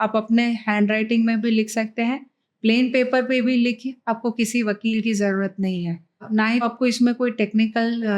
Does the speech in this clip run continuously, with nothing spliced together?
no; 1 cut; at 6.5 s

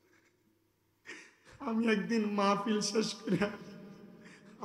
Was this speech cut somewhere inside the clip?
no; 0 cuts

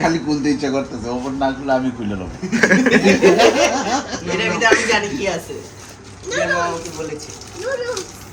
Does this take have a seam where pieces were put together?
no; 0 cuts

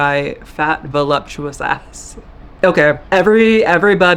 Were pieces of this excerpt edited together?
no; 0 cuts

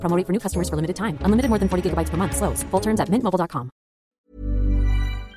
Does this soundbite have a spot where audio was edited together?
yes; 1 cut; at 4.2 s

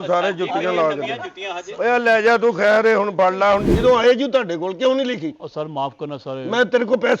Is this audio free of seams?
no; 1 cut; at 3.7 s

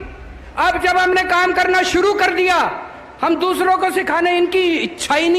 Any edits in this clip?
no; 0 cuts

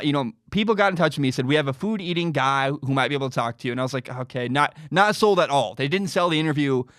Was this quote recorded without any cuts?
yes; 0 cuts

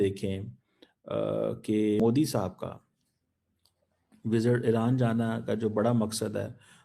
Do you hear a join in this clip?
yes; 1 cut; at 2.0 s

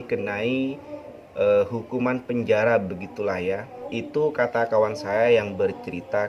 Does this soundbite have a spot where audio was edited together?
no; 0 cuts

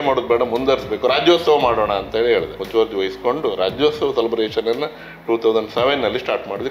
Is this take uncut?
no; 1 cut; at 2.6 s

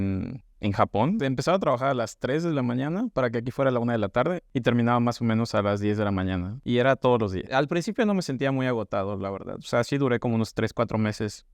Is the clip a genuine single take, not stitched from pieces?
no; 3 cuts; at 1.2 s, 6.5 s, 7.5 s

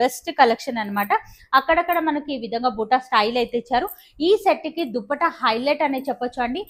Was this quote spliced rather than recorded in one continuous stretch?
no; 0 cuts

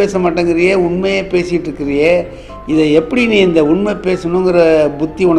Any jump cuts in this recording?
no; 0 cuts

